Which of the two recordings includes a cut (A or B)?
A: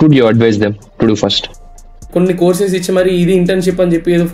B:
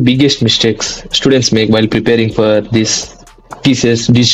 A